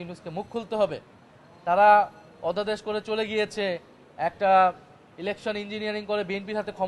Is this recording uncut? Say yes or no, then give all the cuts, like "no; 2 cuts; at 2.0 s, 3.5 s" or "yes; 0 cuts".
yes; 0 cuts